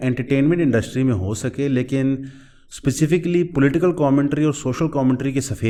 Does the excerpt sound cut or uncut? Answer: uncut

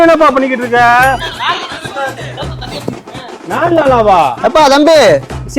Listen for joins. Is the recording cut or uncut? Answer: cut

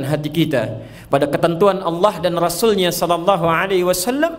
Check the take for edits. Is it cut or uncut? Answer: uncut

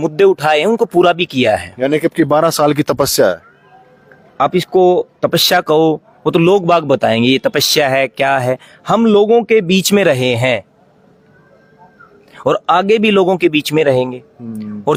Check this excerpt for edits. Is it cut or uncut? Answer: uncut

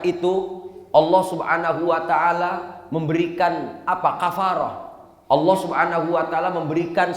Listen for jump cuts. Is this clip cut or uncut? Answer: uncut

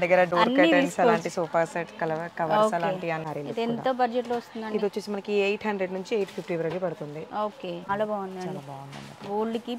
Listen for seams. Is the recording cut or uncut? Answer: cut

